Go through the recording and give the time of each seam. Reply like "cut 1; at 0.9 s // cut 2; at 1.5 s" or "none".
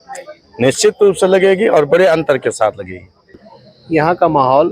cut 1; at 3.1 s